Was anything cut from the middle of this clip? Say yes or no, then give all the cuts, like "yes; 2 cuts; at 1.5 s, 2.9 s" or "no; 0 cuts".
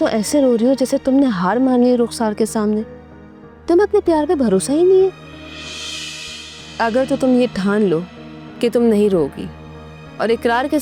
no; 0 cuts